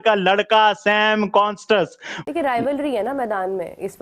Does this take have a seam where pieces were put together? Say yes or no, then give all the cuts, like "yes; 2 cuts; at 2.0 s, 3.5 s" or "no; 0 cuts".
yes; 1 cut; at 2.1 s